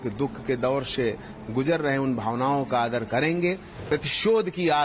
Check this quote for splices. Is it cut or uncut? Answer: cut